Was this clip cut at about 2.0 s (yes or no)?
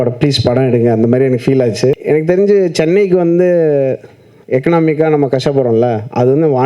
yes